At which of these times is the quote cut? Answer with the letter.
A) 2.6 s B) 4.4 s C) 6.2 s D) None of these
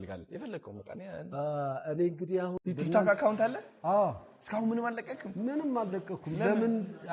A